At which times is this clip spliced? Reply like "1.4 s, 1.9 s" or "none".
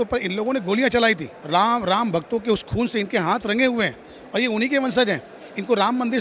1.3 s